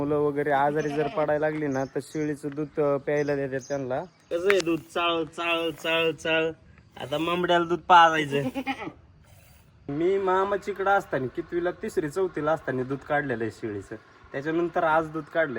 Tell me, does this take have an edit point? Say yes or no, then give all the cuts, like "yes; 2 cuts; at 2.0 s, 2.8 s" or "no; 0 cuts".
yes; 2 cuts; at 4.2 s, 9.9 s